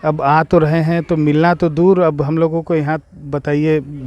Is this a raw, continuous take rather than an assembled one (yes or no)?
yes